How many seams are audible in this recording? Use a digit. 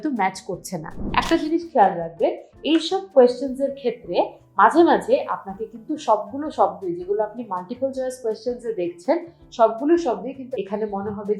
2